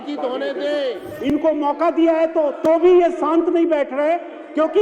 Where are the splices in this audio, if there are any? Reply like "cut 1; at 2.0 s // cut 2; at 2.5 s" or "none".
cut 1; at 1.1 s